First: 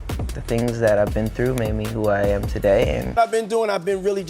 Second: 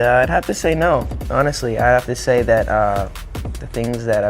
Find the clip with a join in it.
first; 1 cut; at 3.1 s

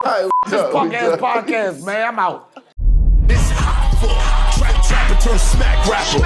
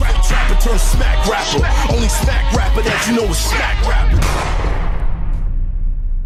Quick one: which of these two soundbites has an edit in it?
first; 1 cut; at 2.5 s

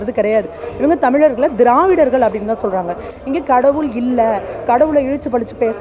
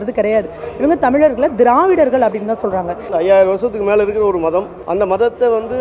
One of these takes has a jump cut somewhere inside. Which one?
second; 2 cuts; at 3.1 s, 4.8 s

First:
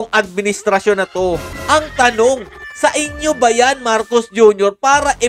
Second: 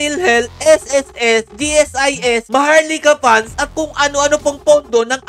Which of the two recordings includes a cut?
first; 1 cut; at 1.5 s

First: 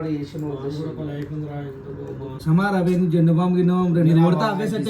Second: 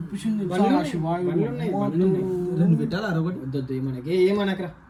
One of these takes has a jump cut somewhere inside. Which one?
first; 1 cut; at 2.3 s

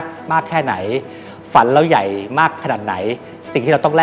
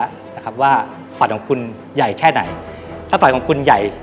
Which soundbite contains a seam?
second; 1 cut; at 1.8 s

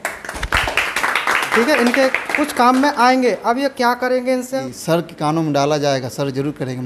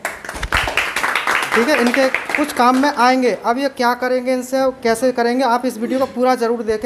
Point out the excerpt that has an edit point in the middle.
first; 1 cut; at 4.6 s

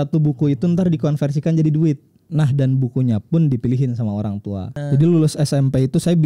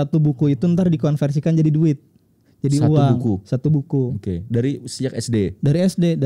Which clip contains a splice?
first; 2 cuts; at 2.3 s, 4.8 s

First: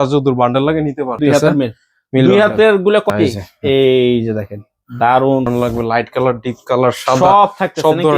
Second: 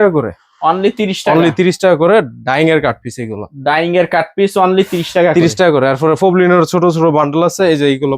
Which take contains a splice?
first; 3 cuts; at 1.2 s, 3.1 s, 5.5 s

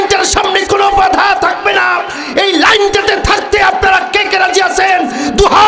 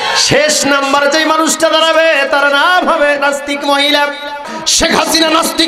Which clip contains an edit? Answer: second; 1 cut; at 4.6 s

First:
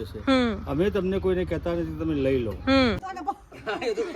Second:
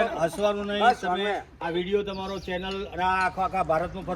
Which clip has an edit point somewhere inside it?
first; 1 cut; at 3.0 s

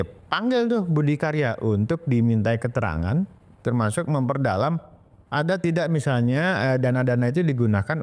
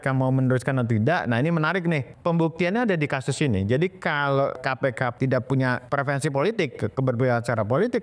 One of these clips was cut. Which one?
second; 3 cuts; at 2.1 s, 4.7 s, 5.8 s

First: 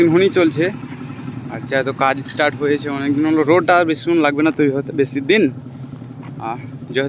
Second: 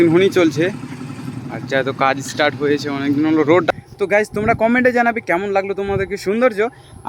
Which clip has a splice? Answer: second; 1 cut; at 3.7 s

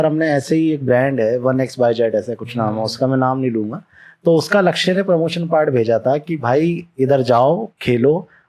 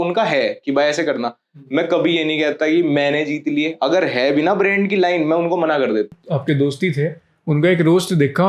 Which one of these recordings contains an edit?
second; 1 cut; at 6.2 s

